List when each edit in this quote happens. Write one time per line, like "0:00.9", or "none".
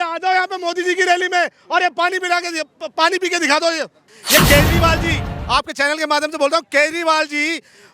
0:04.1